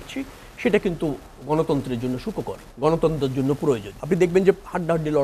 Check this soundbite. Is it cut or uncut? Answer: cut